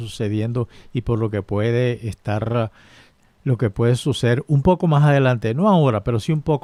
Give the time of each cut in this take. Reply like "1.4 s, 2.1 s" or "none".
none